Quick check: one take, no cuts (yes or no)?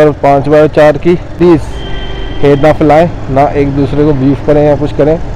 no